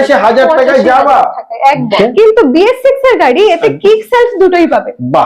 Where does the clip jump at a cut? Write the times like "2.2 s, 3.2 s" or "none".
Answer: 1.9 s